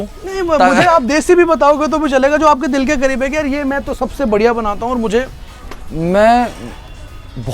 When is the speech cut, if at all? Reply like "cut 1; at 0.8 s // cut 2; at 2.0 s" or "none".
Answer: none